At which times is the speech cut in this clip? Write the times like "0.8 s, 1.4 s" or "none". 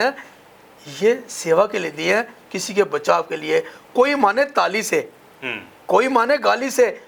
none